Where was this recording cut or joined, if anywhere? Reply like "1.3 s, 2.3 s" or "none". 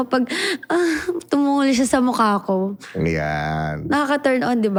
none